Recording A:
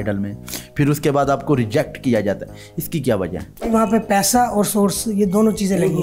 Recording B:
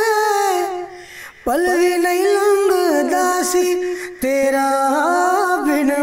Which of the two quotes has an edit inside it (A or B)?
A